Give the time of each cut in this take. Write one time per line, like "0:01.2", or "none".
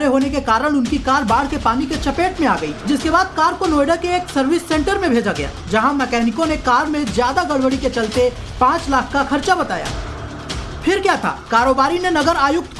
0:06.2